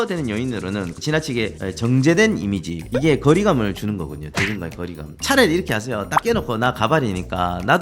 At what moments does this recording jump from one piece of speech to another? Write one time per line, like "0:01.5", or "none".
0:00.9
0:05.2

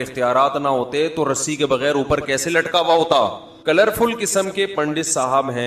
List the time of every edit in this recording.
0:03.5

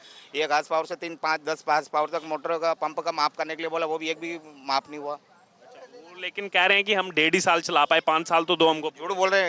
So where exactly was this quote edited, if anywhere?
none

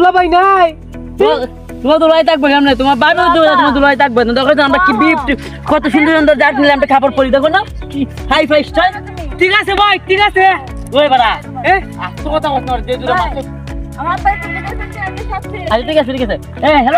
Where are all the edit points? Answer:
none

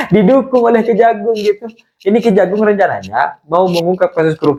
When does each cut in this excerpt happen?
none

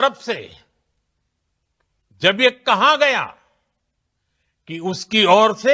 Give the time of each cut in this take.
none

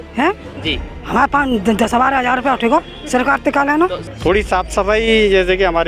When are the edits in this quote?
0:04.0

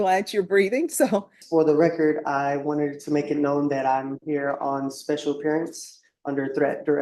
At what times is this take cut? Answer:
0:01.4

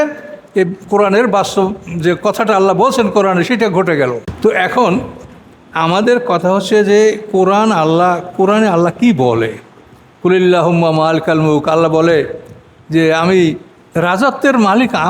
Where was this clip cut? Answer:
0:04.3

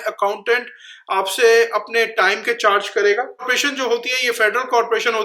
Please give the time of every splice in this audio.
0:03.5

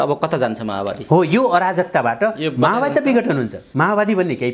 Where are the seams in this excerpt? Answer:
0:03.6

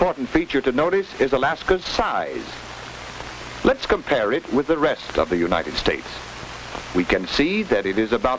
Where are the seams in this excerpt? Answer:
0:02.8

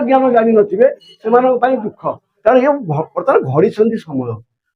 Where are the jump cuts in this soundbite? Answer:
0:02.3

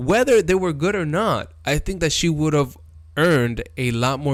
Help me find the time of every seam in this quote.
none

